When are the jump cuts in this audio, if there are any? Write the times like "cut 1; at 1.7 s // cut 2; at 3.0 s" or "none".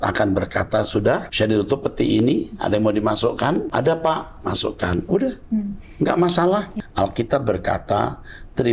cut 1; at 1.3 s // cut 2; at 3.7 s // cut 3; at 6.8 s